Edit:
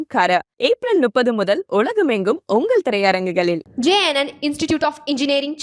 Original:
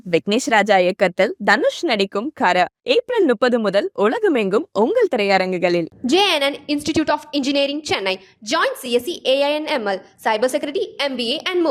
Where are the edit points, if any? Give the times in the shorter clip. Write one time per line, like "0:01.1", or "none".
none